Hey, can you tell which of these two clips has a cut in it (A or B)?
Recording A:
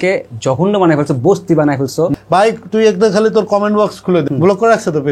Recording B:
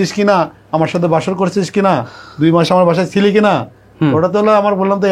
A